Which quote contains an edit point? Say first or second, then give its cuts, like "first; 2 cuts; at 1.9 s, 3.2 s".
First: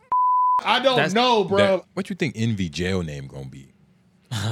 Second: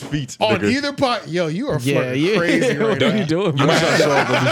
first; 1 cut; at 1.9 s